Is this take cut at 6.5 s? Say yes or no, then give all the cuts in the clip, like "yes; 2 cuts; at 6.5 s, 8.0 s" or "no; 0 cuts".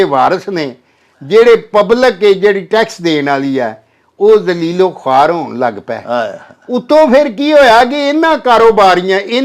no; 0 cuts